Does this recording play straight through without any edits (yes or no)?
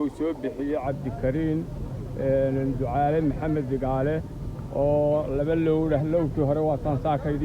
yes